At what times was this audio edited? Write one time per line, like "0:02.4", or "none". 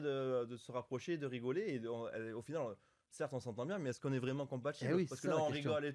none